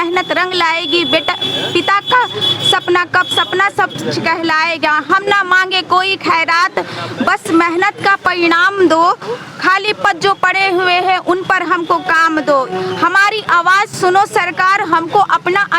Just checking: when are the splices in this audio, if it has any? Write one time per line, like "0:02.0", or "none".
none

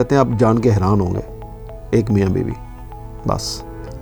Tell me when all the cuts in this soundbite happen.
none

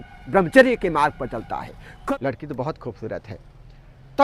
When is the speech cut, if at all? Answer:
0:01.9

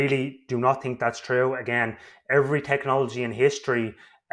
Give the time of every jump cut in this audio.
none

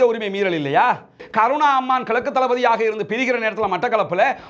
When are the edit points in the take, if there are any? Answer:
0:01.2

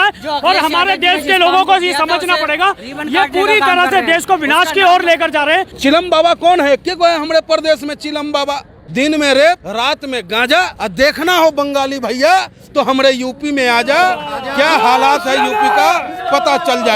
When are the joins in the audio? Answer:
0:05.7
0:08.8
0:09.7
0:10.7

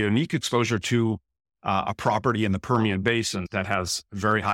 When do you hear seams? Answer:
0:03.5

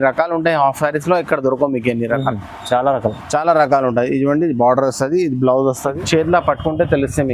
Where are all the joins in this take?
0:06.0

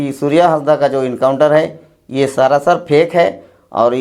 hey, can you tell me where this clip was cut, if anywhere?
none

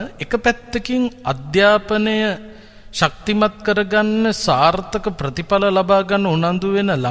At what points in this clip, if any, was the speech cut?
none

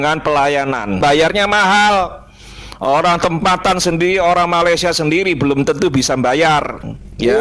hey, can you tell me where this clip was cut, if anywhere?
0:01.0

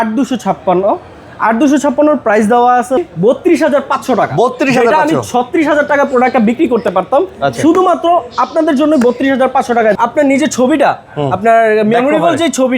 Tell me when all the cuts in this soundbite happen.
0:03.0
0:09.9

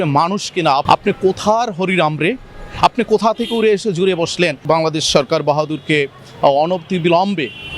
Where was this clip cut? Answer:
0:00.8
0:04.6

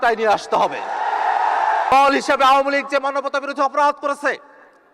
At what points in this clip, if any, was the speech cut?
0:01.9

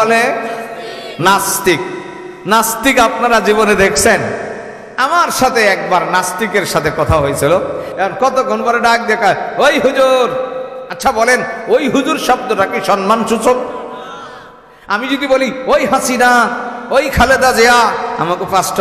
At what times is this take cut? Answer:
0:07.9

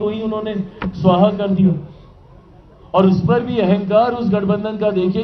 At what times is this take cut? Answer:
none

